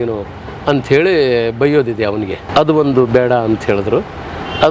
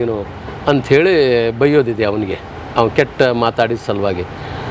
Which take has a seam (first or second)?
first